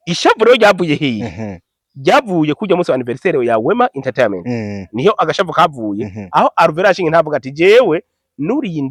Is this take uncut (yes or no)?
yes